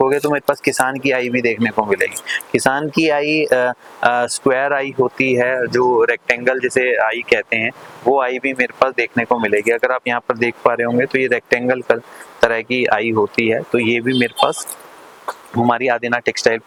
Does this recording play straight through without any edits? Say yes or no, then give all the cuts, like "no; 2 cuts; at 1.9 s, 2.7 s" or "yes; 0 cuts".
yes; 0 cuts